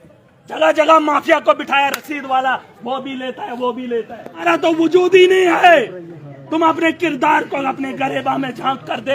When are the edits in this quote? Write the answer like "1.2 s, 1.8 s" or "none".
4.4 s